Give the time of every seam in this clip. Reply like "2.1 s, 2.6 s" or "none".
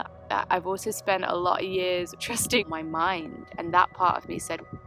2.2 s